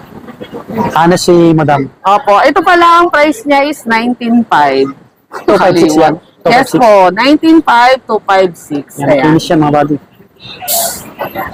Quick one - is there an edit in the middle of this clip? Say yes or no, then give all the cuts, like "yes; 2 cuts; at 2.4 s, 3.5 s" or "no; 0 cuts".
no; 0 cuts